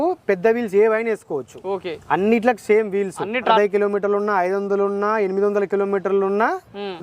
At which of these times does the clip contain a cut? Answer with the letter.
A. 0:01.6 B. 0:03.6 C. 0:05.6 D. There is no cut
B